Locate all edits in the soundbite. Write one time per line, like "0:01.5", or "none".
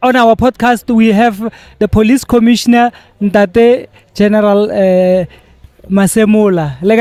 none